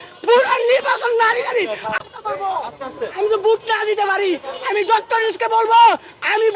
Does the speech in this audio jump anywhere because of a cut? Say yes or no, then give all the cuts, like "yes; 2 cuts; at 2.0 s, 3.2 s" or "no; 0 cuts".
yes; 1 cut; at 2.3 s